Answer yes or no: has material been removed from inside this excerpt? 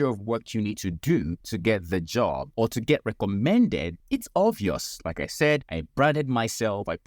yes